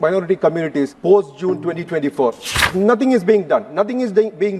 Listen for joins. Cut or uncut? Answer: cut